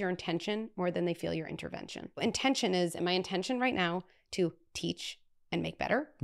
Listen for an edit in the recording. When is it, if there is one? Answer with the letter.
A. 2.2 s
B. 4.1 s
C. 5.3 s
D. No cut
A